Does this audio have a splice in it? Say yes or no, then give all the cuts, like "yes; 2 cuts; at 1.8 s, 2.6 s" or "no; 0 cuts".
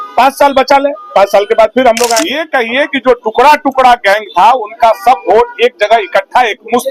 yes; 1 cut; at 2.4 s